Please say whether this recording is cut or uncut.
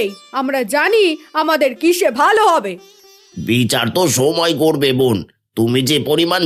uncut